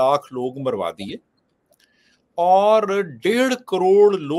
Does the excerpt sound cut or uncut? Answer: uncut